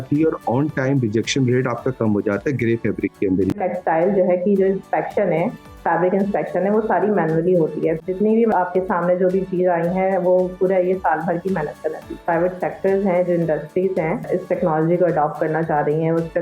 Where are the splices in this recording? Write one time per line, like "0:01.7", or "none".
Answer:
0:03.6
0:08.4
0:12.2
0:14.2